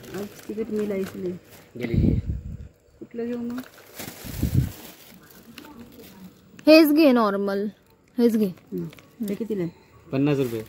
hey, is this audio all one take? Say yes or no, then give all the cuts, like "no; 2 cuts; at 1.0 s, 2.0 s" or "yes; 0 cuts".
yes; 0 cuts